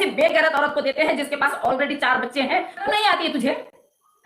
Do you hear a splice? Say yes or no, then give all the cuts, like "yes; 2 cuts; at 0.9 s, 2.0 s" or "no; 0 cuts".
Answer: yes; 1 cut; at 2.9 s